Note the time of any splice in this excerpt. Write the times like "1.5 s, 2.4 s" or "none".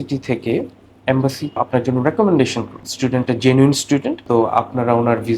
1.6 s, 2.8 s, 4.2 s